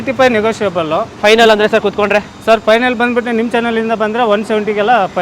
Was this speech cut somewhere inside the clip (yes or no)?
no